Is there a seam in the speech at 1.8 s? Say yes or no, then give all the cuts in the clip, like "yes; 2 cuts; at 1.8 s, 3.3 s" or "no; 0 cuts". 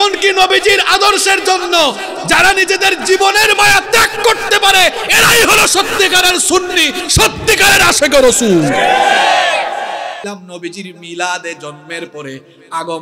no; 1 cut; at 10.3 s